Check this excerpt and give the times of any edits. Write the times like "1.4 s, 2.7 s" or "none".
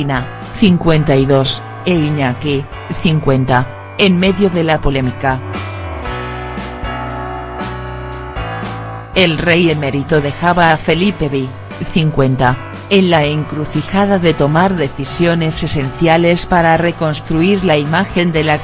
none